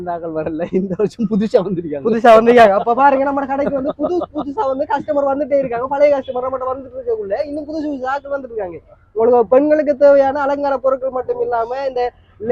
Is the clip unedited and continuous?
yes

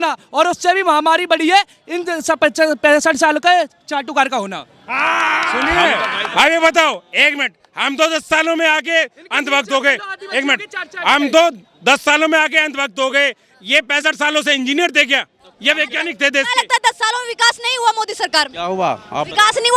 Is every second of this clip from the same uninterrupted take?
yes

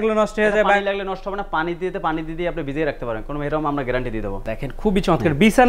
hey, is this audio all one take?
no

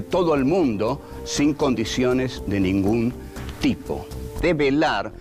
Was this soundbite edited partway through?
yes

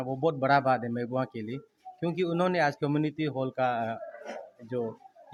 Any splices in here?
no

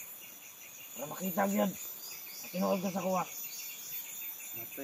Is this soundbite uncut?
yes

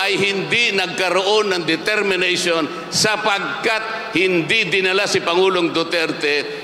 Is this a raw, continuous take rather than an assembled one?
yes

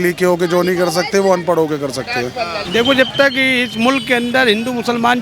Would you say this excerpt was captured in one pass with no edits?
no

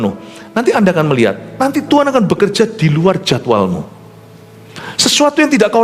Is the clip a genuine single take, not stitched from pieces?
yes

